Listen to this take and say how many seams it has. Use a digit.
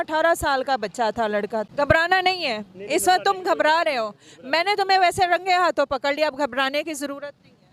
1